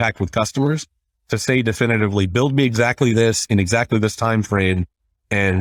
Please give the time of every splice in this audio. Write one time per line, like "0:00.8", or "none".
none

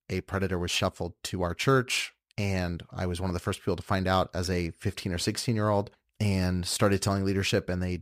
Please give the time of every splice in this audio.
0:06.0

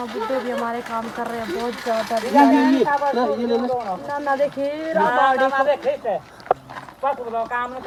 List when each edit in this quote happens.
none

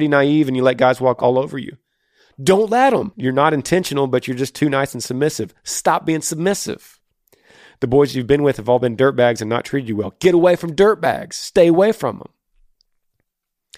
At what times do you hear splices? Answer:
0:01.2
0:03.1

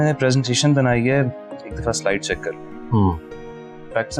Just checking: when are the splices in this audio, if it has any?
none

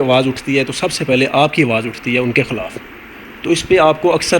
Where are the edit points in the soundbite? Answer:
none

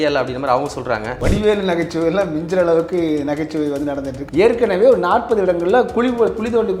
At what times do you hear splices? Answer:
0:01.1
0:04.1

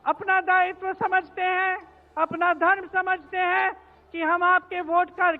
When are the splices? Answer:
none

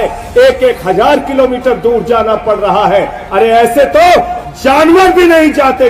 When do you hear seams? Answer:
none

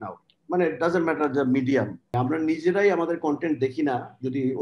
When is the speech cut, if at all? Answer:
0:02.0

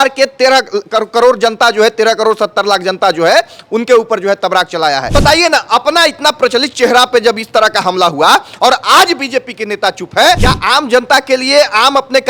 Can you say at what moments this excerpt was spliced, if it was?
0:05.0
0:10.4

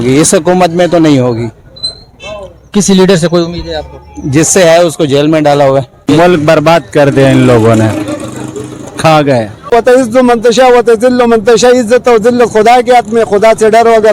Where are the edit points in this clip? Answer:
0:06.1
0:09.7

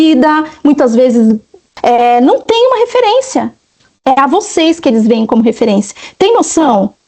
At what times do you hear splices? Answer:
0:01.7

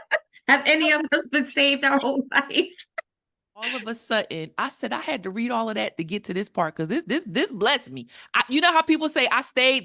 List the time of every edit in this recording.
0:03.8

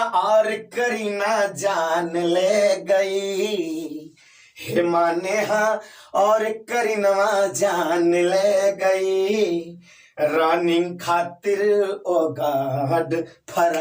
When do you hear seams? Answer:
none

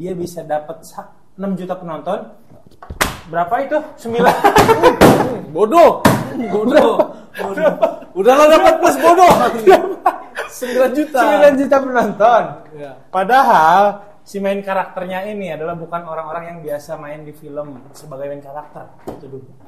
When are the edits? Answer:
none

